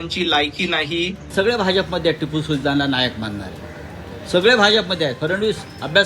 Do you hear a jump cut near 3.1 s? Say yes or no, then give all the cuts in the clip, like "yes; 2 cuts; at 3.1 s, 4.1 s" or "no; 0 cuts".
no; 1 cut; at 1.3 s